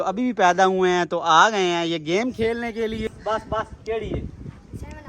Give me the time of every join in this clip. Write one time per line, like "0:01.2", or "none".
0:03.0